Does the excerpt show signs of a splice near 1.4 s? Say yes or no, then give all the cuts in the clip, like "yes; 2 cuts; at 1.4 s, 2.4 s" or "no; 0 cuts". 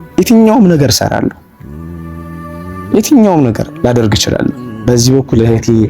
yes; 3 cuts; at 1.4 s, 2.9 s, 4.8 s